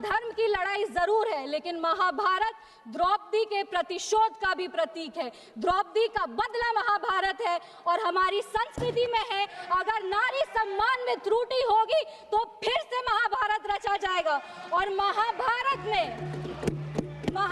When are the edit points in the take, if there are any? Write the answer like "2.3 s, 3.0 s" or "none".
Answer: none